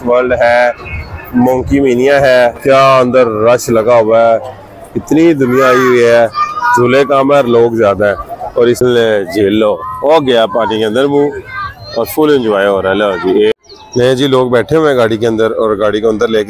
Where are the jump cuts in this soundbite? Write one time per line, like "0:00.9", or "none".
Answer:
0:02.6
0:08.8
0:13.5